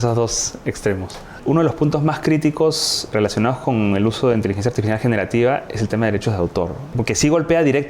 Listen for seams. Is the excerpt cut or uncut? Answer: cut